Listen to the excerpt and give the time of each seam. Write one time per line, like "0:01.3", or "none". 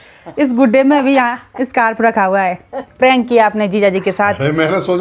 0:02.8